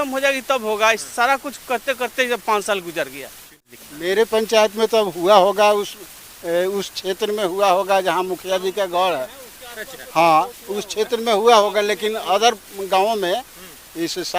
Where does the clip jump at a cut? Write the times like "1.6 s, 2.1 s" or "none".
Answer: 3.7 s